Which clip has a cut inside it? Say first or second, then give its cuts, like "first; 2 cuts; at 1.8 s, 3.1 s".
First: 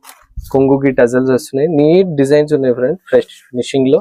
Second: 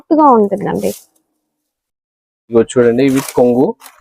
second; 1 cut; at 2.5 s